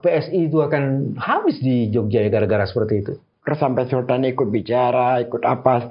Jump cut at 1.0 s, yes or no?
no